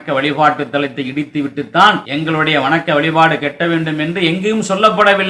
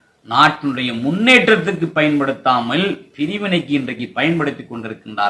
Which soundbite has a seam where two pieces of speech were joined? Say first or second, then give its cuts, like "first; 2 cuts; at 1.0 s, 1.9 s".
first; 1 cut; at 2.1 s